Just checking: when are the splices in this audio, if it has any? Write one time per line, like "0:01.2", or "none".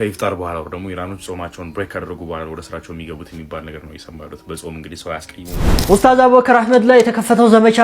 0:05.9